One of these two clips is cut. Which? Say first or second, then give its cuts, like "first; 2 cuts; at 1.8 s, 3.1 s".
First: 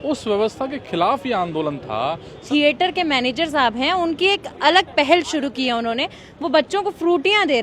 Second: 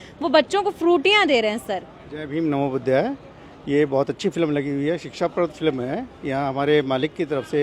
first; 1 cut; at 2.4 s